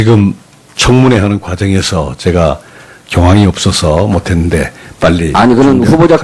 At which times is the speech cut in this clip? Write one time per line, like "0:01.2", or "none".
0:02.4